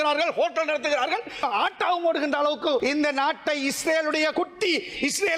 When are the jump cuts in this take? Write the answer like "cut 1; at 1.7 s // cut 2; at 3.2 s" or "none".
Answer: cut 1; at 1.4 s // cut 2; at 2.8 s // cut 3; at 4.3 s